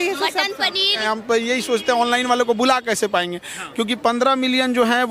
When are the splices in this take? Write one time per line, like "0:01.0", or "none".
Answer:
0:01.0